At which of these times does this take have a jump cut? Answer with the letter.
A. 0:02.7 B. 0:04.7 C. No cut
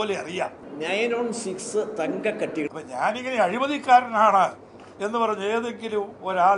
A